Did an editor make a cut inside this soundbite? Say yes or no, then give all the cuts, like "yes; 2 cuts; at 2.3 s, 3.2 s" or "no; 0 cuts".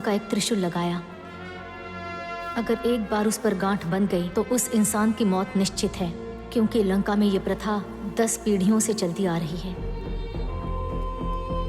yes; 1 cut; at 9.8 s